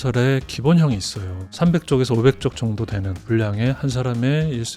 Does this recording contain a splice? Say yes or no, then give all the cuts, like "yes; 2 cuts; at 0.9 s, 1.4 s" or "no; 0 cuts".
no; 0 cuts